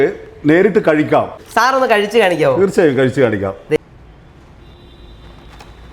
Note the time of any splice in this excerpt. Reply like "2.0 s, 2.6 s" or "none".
1.4 s, 3.8 s